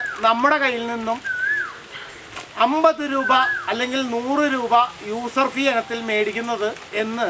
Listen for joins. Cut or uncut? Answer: uncut